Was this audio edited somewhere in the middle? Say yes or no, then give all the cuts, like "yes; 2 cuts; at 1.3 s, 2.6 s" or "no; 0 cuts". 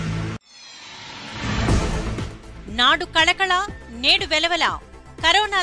no; 0 cuts